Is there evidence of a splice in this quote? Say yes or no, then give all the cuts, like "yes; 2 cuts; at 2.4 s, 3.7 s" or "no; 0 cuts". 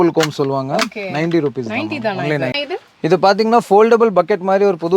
yes; 1 cut; at 2.5 s